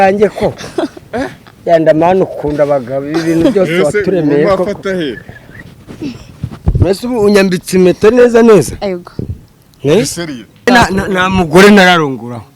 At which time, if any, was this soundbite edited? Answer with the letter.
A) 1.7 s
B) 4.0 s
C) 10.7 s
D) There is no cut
C